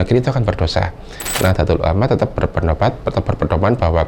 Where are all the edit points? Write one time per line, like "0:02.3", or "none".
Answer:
0:01.4